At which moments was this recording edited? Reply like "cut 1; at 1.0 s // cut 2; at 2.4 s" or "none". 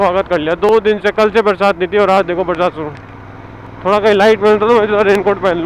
none